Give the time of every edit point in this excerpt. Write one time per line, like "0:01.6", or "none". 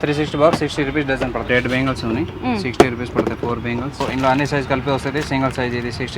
0:01.4
0:04.0